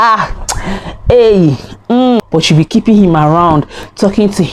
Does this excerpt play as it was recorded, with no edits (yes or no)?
no